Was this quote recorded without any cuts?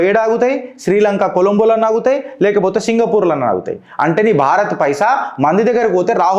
yes; 0 cuts

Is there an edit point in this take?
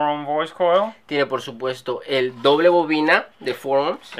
yes; 1 cut; at 2.3 s

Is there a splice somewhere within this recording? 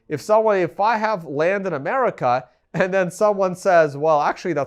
no; 0 cuts

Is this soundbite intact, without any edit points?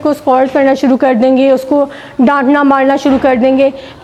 yes; 0 cuts

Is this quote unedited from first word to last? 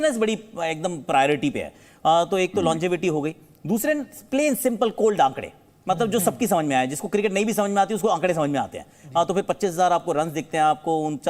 yes; 0 cuts

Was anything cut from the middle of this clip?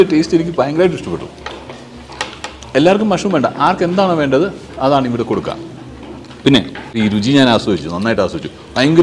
yes; 1 cut; at 7.0 s

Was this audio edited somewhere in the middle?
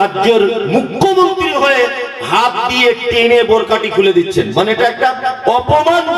no; 0 cuts

